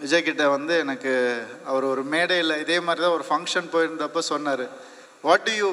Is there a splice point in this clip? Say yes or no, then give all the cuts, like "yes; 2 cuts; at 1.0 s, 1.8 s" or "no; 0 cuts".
no; 0 cuts